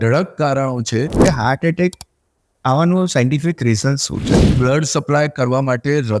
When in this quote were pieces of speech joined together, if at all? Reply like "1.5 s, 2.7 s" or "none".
1.2 s, 4.3 s